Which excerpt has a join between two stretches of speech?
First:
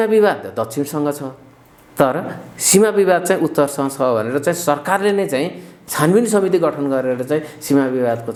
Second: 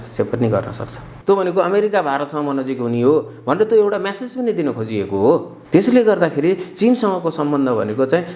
second; 2 cuts; at 1.1 s, 5.6 s

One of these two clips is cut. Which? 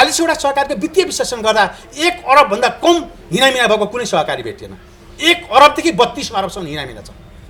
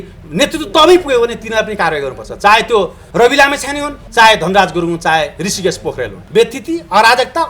second; 3 cuts; at 3.0 s, 3.9 s, 6.2 s

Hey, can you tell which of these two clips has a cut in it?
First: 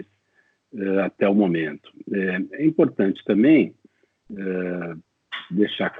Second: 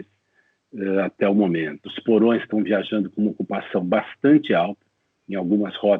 second; 1 cut; at 1.9 s

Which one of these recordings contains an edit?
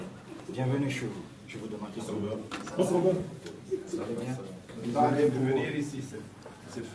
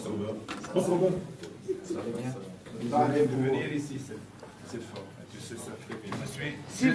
second; 1 cut; at 6.0 s

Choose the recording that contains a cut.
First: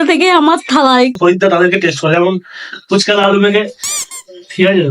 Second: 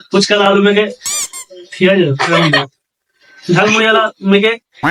first; 1 cut; at 1.2 s

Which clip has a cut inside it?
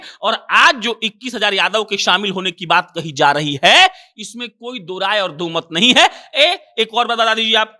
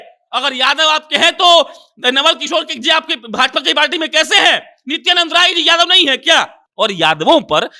second; 1 cut; at 6.6 s

